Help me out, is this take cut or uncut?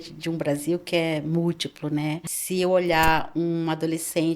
cut